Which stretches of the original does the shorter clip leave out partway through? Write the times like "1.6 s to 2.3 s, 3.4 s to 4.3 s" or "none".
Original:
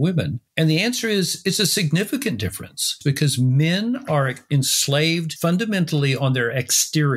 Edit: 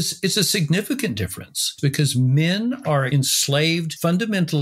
4.3 s to 4.5 s